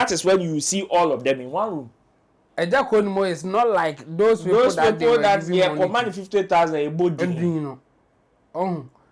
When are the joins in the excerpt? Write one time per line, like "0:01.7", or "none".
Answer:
0:02.4